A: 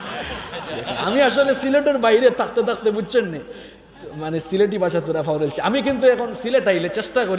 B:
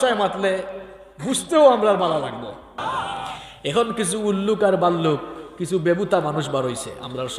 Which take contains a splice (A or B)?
B